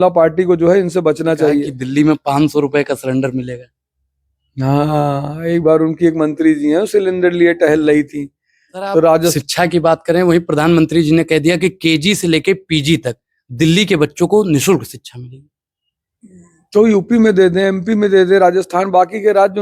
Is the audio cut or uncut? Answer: cut